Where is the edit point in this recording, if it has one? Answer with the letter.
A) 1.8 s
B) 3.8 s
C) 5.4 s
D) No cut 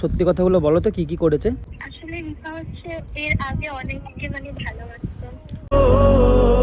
A